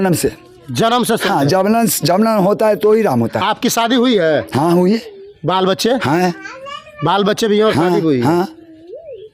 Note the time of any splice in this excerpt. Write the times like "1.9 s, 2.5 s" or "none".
none